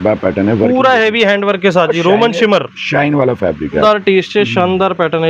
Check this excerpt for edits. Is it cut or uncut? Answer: cut